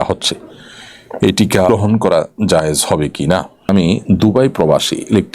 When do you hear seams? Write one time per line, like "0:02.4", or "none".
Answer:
0:01.7
0:03.7

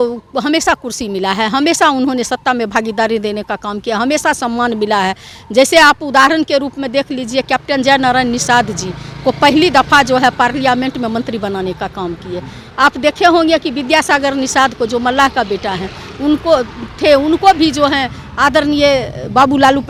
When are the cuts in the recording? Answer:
none

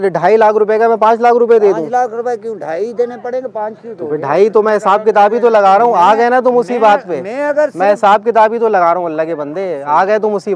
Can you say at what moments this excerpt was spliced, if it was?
none

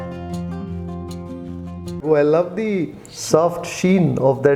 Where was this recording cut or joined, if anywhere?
0:02.0

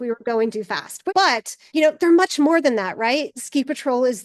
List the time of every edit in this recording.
0:01.2
0:03.3

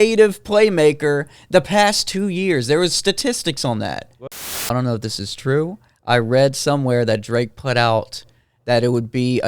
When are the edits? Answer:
0:04.5

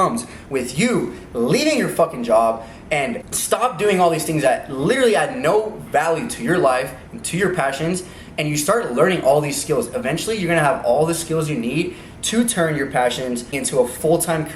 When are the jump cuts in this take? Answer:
0:03.3
0:13.5

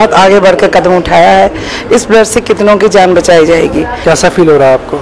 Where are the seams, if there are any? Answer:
0:03.9

